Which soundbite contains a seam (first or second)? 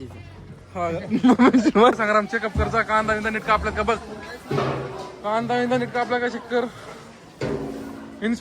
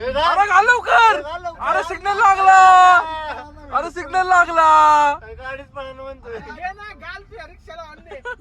first